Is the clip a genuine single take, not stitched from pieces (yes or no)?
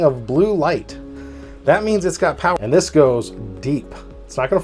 no